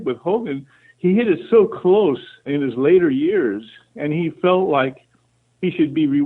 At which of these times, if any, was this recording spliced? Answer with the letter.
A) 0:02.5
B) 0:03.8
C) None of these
A